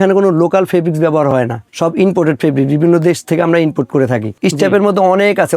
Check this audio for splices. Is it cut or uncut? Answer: cut